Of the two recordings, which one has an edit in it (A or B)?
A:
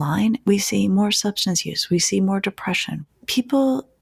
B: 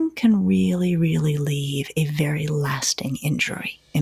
A